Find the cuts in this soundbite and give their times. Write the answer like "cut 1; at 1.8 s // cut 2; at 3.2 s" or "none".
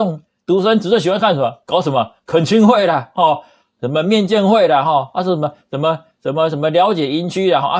none